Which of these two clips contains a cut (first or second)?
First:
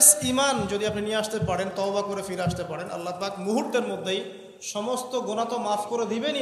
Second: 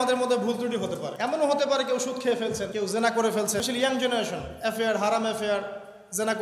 second